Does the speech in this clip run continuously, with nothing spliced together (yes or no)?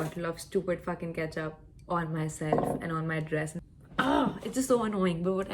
no